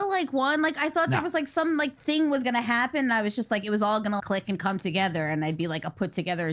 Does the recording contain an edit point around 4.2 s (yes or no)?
yes